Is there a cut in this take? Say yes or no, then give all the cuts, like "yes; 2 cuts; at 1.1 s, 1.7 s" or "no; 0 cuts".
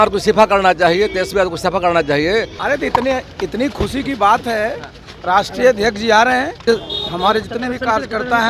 yes; 2 cuts; at 2.5 s, 6.6 s